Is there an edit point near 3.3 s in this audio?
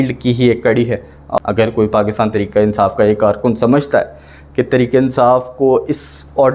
no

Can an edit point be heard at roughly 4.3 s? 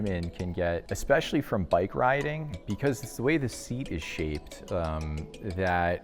no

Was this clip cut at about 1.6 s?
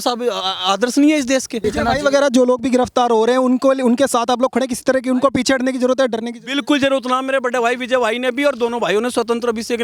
yes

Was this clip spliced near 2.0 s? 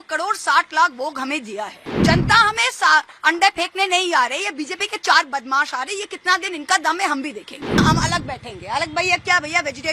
yes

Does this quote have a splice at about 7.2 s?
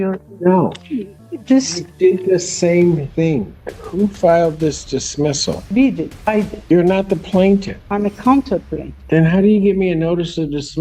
no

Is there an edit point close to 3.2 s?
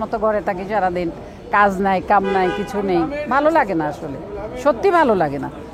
no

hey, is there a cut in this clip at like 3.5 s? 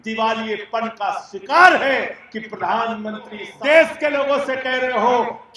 yes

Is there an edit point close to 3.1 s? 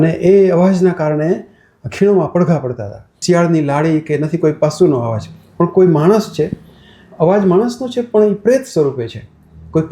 yes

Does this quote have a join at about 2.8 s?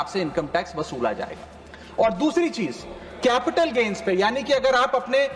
no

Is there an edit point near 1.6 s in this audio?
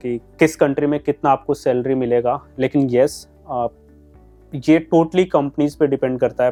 no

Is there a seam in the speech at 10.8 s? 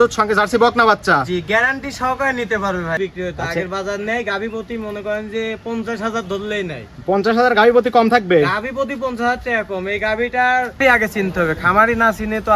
yes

